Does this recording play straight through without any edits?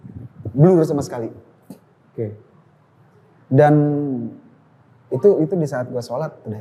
yes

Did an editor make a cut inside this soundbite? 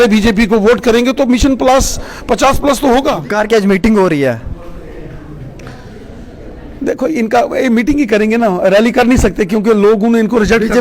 yes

